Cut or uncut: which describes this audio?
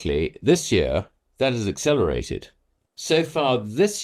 uncut